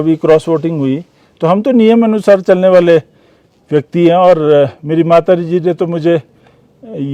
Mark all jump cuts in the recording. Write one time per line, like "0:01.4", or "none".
none